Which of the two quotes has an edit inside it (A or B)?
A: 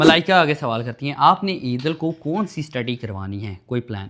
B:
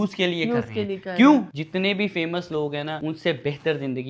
B